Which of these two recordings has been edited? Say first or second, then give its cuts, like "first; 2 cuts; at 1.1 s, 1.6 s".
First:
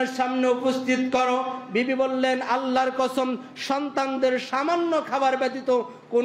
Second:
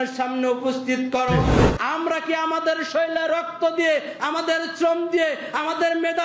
second; 1 cut; at 1.6 s